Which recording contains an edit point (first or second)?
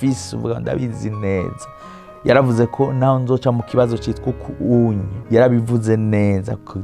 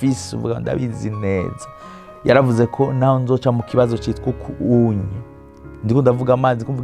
first